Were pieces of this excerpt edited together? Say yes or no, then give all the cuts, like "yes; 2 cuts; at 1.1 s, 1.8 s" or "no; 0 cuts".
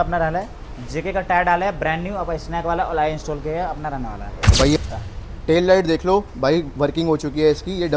yes; 1 cut; at 4.8 s